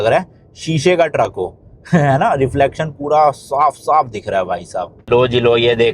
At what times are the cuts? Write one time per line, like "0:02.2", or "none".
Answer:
0:05.0